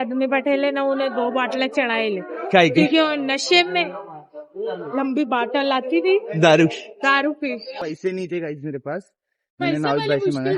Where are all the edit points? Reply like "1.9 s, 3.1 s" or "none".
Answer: 7.8 s

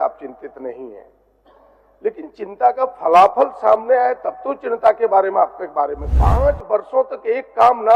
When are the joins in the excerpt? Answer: 6.1 s

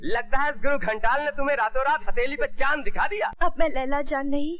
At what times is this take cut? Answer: 3.3 s

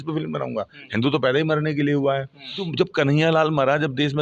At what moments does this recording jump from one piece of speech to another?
2.7 s

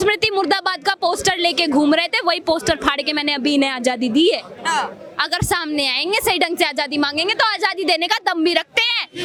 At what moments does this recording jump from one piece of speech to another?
none

